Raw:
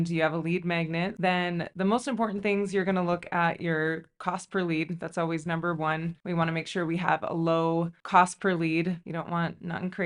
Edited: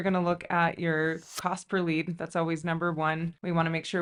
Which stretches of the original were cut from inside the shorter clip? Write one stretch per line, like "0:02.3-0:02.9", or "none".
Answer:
none